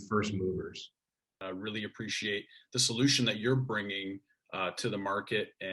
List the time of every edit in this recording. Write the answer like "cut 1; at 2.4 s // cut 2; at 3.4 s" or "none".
cut 1; at 1.3 s